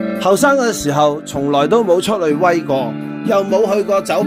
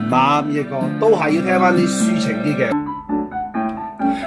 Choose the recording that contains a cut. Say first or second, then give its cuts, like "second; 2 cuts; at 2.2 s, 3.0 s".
second; 1 cut; at 2.7 s